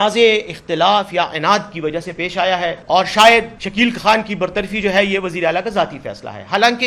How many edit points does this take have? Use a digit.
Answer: 2